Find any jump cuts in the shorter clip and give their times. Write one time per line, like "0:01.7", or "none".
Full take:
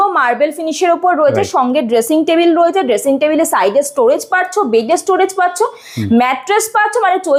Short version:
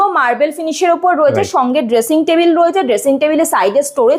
none